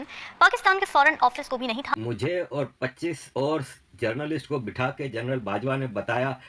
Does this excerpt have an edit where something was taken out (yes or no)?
yes